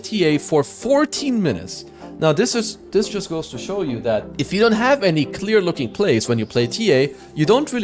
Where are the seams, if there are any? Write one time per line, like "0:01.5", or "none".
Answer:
0:04.3